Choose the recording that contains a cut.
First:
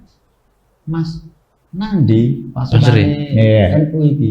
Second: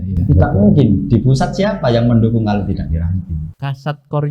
second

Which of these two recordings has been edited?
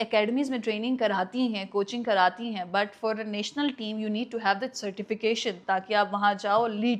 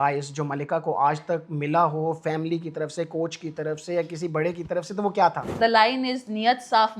second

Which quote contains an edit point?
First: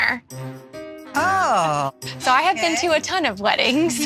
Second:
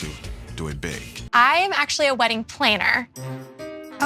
second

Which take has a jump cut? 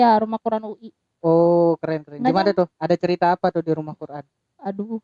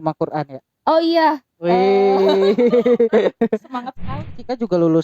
second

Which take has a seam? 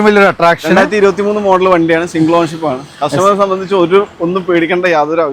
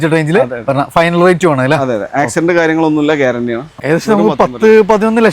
second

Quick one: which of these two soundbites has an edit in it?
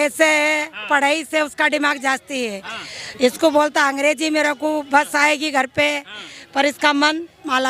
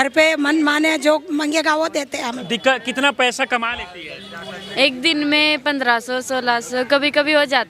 second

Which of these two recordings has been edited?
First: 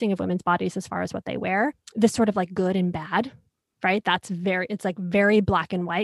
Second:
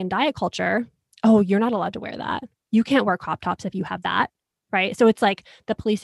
first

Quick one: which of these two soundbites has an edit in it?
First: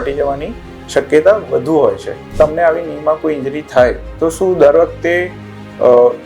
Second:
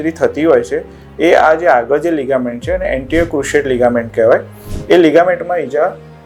first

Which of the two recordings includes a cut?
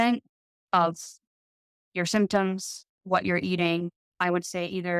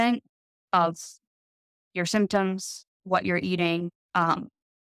first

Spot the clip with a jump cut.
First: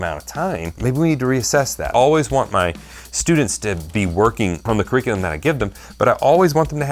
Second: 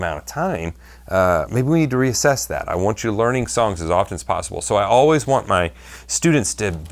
first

